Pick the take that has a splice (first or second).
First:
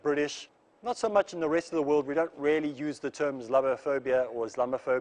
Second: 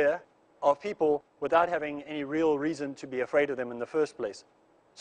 second